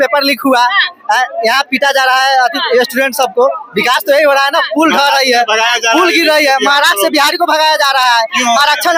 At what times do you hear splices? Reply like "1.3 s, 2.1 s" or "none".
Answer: none